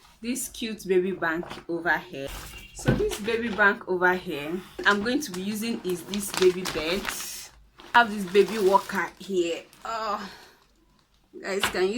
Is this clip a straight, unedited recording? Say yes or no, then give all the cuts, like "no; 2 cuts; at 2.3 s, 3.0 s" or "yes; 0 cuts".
no; 3 cuts; at 2.5 s, 4.8 s, 7.9 s